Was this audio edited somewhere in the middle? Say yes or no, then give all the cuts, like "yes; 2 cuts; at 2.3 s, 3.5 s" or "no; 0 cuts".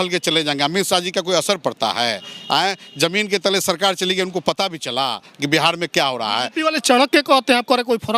no; 0 cuts